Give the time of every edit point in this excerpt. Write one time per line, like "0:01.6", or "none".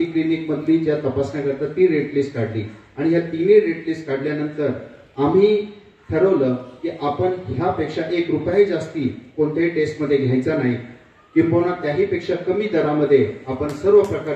none

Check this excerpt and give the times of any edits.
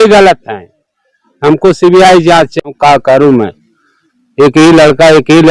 0:02.7

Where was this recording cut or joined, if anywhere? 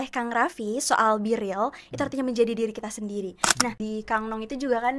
0:03.8

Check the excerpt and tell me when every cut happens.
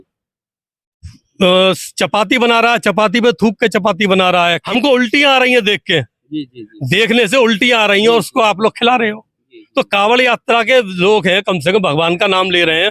0:04.6

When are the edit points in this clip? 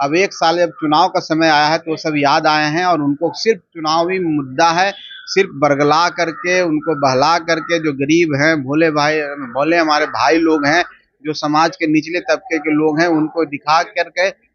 none

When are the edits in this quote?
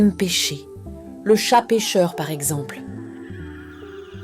0:02.6

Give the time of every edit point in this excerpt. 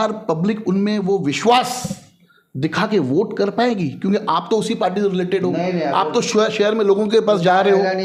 none

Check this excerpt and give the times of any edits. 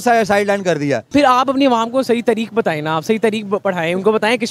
0:01.0

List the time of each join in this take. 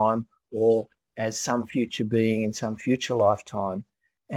0:01.1

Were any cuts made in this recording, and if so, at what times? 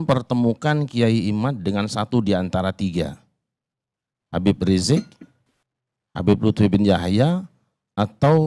none

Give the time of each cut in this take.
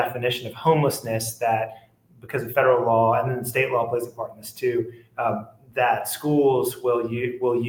none

